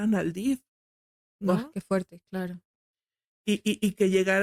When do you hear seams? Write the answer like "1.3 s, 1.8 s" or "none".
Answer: none